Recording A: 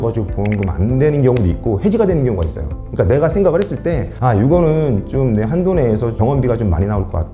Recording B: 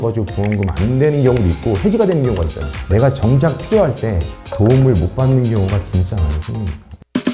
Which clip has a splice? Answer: B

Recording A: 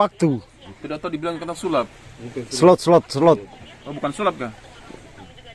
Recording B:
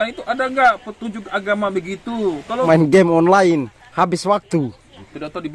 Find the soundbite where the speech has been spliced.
B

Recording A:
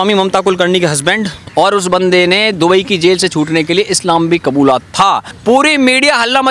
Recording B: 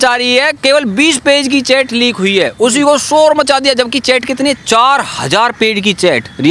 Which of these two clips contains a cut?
A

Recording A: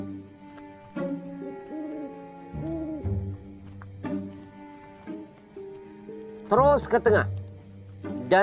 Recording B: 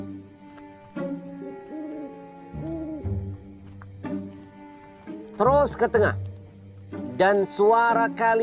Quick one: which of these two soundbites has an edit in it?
B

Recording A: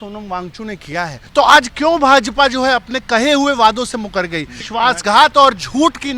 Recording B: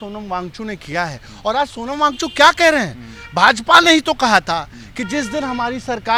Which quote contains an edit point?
A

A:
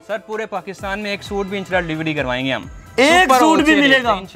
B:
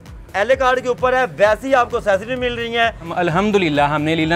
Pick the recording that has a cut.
B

